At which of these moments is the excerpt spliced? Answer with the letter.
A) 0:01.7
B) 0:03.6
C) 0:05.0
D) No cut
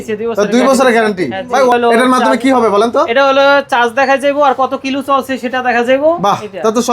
A